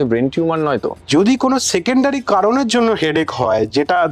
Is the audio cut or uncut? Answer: cut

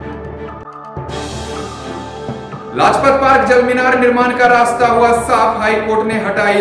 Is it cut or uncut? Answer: cut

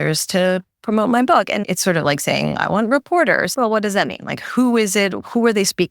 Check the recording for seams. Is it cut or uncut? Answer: cut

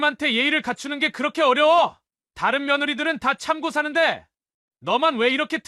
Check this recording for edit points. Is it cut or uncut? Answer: uncut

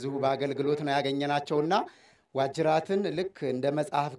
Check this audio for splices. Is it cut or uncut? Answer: uncut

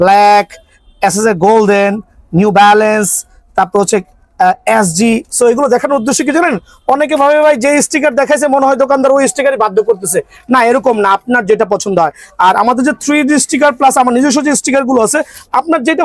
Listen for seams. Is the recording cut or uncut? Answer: uncut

